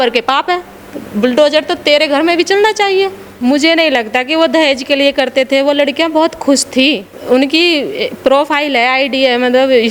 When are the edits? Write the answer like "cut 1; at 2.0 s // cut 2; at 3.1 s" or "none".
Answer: cut 1; at 3.2 s // cut 2; at 7.1 s

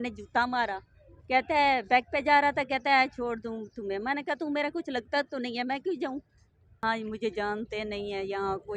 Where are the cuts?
cut 1; at 6.8 s

